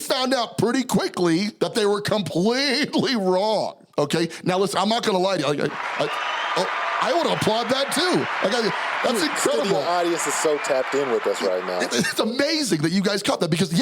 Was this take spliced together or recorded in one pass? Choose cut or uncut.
cut